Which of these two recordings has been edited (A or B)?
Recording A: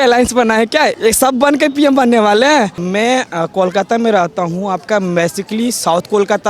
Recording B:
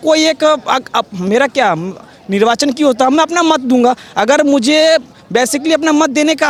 A